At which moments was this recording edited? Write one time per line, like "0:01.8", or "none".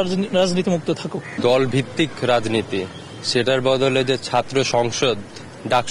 0:01.3

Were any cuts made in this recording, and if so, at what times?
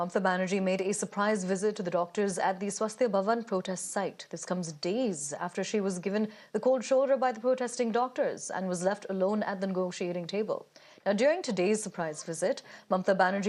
none

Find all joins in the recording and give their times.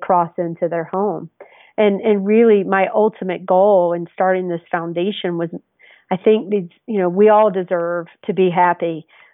0:08.1

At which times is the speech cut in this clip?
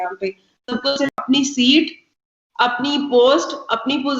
0:01.2

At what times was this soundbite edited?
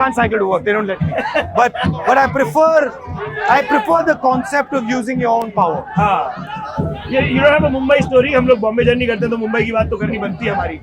none

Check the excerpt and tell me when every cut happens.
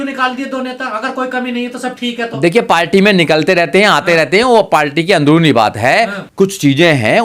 0:06.2

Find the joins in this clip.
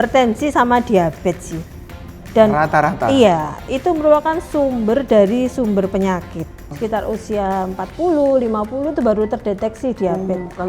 0:06.7

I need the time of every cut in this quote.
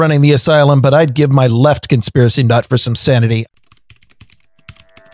0:03.4

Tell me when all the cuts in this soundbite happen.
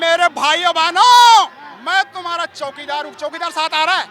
none

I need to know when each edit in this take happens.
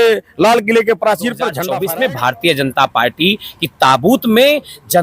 0:01.6

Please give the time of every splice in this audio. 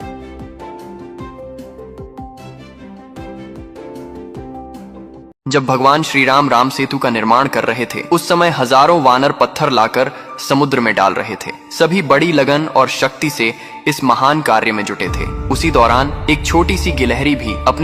0:01.4

